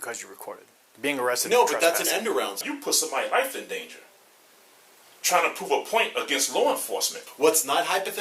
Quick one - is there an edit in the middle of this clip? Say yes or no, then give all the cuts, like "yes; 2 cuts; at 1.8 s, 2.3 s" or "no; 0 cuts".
yes; 2 cuts; at 2.6 s, 7.3 s